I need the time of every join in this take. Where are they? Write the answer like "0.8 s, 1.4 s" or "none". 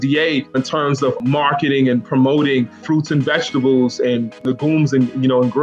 1.0 s, 2.8 s, 4.4 s

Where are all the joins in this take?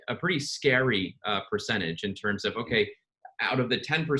none

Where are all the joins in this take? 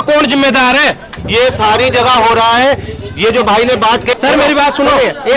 4.2 s

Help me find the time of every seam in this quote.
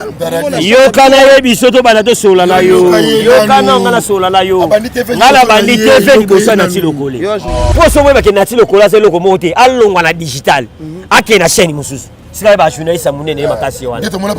7.6 s

